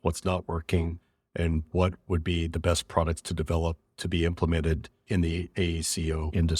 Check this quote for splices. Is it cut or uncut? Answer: cut